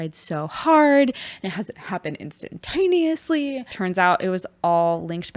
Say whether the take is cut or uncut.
cut